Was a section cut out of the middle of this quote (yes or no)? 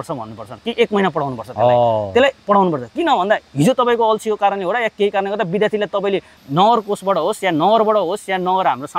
yes